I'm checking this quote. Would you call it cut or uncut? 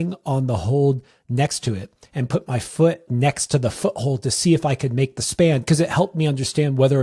cut